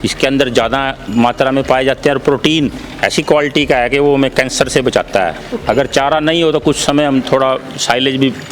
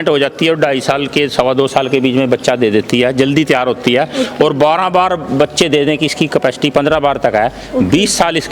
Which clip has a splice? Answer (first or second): first